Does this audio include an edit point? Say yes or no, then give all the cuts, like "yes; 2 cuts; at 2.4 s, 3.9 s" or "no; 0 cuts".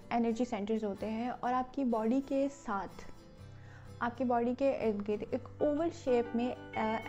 no; 0 cuts